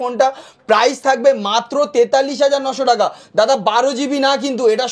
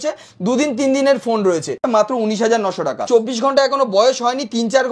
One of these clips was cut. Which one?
second; 2 cuts; at 1.8 s, 3.0 s

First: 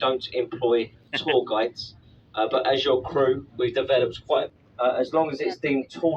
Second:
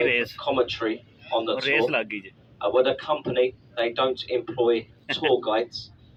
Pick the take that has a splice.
first; 1 cut; at 4.5 s

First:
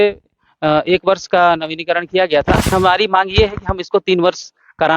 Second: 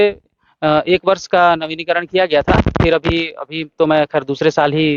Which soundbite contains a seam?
first; 1 cut; at 2.7 s

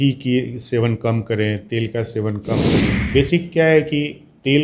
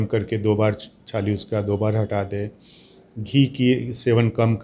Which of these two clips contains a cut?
first; 1 cut; at 3.0 s

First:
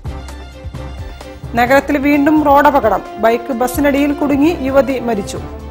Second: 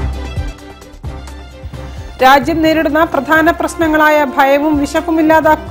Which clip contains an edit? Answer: second; 1 cut; at 1.5 s

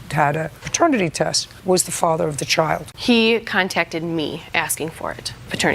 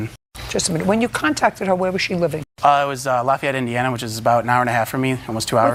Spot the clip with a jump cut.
first; 1 cut; at 2.9 s

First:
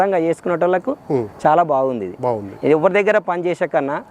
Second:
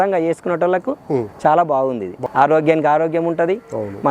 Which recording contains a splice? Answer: second; 1 cut; at 2.1 s

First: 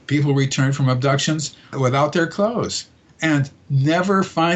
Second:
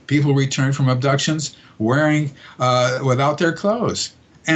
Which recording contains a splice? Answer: first; 1 cut; at 1.7 s

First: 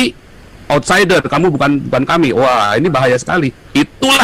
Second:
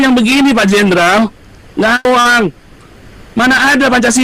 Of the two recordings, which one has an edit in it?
second; 1 cut; at 2.1 s

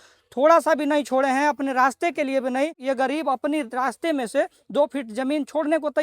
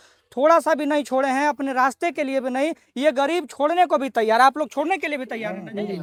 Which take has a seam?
first; 1 cut; at 2.8 s

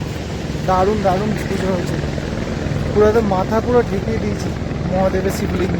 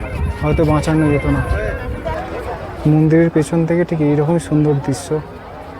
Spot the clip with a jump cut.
second; 1 cut; at 2.1 s

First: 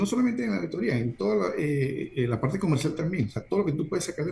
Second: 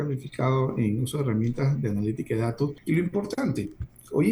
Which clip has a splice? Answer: second; 1 cut; at 2.8 s

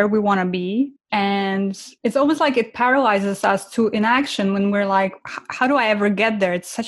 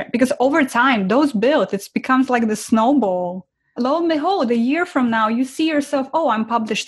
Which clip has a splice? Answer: first; 2 cuts; at 1.0 s, 1.9 s

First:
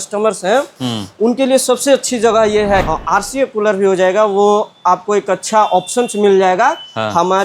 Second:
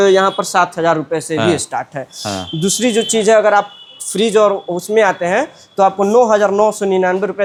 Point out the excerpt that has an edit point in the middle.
first; 1 cut; at 2.9 s

